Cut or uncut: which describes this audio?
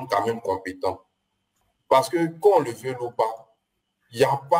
cut